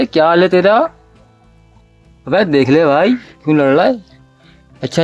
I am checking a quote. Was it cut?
no; 0 cuts

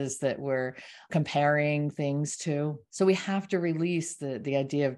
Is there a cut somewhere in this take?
yes; 2 cuts; at 1.1 s, 2.8 s

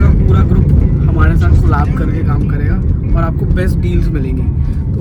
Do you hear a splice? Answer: no; 0 cuts

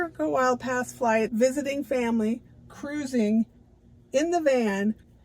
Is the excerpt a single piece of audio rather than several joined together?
no; 1 cut; at 1.3 s

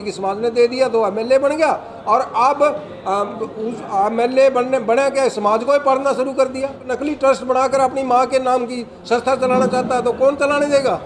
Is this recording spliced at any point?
yes; 1 cut; at 6.9 s

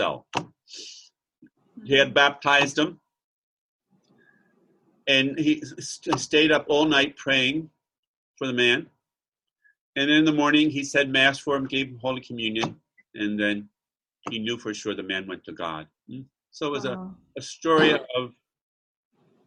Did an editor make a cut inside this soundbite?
no; 0 cuts

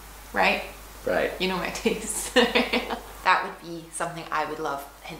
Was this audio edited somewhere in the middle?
yes; 1 cut; at 3.0 s

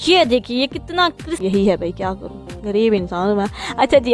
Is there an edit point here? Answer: yes; 1 cut; at 1.4 s

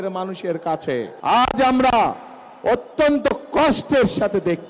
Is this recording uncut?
no; 1 cut; at 1.1 s

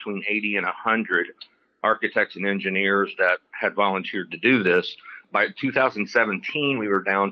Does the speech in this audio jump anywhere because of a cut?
yes; 1 cut; at 5.2 s

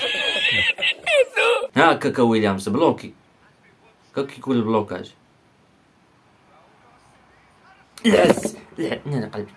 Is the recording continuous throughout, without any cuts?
no; 1 cut; at 1.7 s

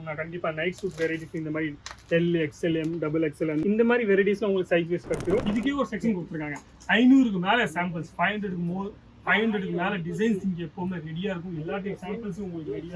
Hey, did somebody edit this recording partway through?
yes; 1 cut; at 5.4 s

